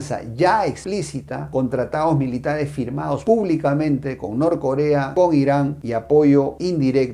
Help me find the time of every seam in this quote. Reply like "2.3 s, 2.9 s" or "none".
none